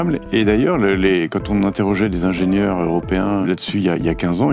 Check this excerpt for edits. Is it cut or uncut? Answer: cut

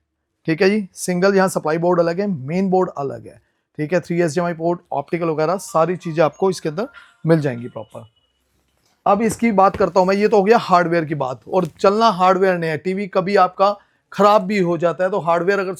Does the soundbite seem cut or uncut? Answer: uncut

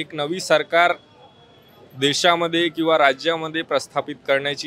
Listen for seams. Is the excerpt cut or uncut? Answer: uncut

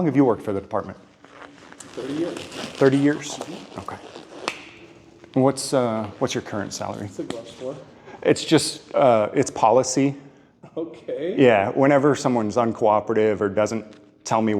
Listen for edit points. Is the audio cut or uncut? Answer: uncut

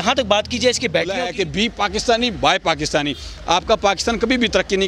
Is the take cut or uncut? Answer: cut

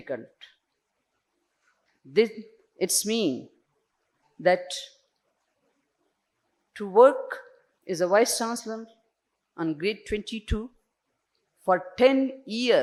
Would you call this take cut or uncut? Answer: uncut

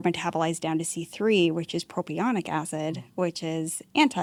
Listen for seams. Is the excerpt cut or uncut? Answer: uncut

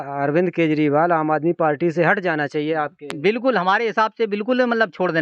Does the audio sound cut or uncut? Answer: uncut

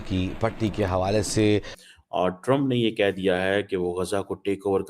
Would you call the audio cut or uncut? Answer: cut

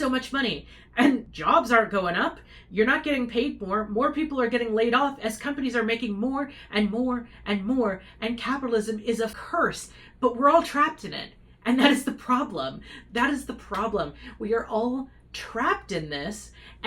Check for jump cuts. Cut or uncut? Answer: cut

